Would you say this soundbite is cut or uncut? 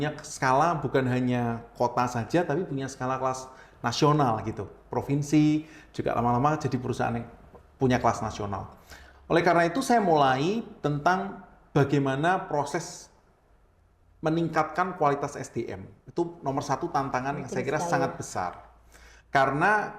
uncut